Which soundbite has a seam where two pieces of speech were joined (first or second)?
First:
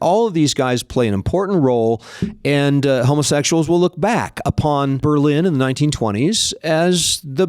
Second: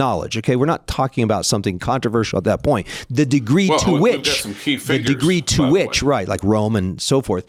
first